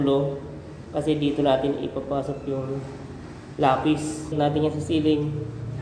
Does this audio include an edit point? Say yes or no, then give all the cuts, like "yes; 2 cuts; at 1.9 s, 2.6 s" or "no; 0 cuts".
yes; 1 cut; at 4.4 s